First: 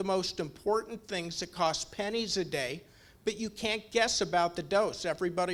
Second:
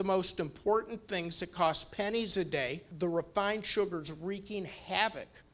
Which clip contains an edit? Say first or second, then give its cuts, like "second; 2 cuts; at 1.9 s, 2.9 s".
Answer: second; 1 cut; at 2.8 s